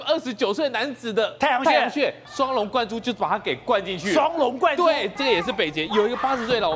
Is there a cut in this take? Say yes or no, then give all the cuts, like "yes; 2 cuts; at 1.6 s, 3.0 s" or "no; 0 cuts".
yes; 2 cuts; at 2.2 s, 5.2 s